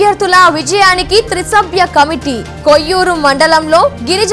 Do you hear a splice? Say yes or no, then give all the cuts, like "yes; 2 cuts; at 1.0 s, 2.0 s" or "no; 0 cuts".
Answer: no; 0 cuts